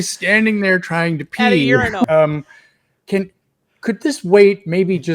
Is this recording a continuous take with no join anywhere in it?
no; 1 cut; at 2.1 s

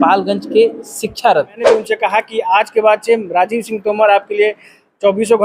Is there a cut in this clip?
yes; 1 cut; at 1.7 s

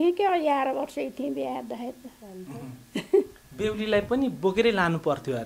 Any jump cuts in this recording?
no; 0 cuts

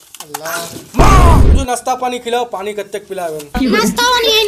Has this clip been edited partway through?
yes; 1 cut; at 1.6 s

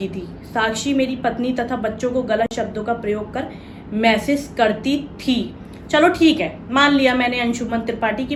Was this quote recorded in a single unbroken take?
yes; 0 cuts

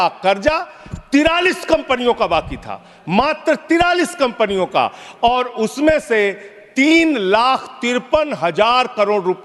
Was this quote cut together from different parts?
no; 0 cuts

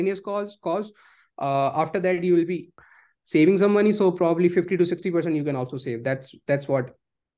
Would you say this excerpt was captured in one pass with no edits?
no; 1 cut; at 2.8 s

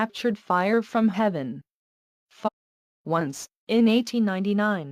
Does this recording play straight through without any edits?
yes; 0 cuts

